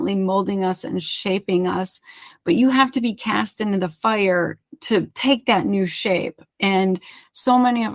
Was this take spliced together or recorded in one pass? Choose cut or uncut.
uncut